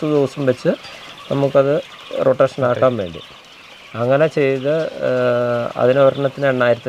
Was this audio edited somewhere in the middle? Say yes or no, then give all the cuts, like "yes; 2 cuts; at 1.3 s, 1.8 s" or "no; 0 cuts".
no; 0 cuts